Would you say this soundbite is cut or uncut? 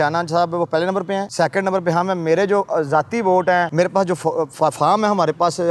uncut